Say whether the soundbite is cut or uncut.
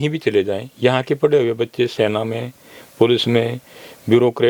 uncut